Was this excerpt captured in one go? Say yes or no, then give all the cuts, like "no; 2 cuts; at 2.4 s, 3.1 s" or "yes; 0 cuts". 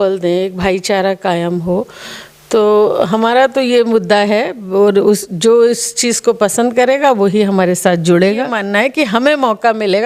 no; 1 cut; at 8.6 s